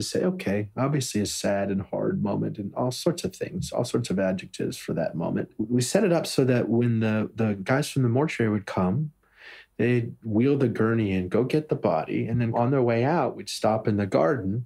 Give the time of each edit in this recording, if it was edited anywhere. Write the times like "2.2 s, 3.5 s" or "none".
5.5 s

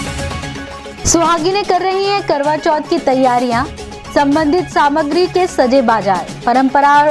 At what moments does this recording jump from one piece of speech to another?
1.0 s

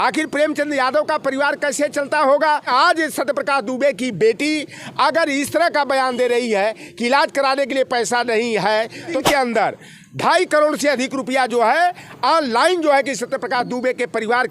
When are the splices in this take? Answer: 2.7 s, 9.2 s

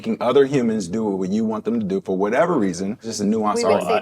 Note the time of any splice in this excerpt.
3.1 s

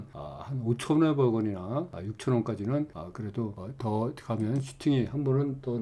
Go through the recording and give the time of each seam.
none

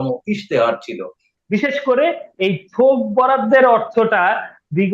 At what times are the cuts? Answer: 1.3 s

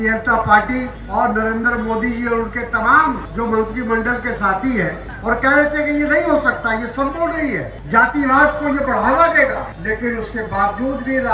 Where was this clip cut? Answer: 1.0 s, 3.3 s, 5.1 s, 7.7 s, 9.7 s

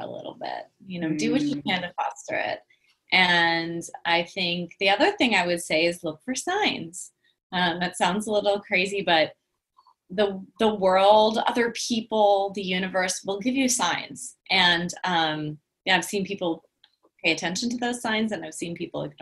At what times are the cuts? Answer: none

